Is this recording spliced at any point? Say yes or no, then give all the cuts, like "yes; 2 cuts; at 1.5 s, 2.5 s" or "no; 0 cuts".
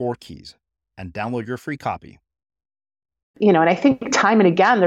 yes; 1 cut; at 3.4 s